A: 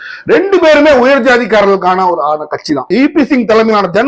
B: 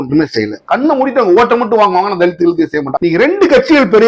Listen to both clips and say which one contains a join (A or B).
B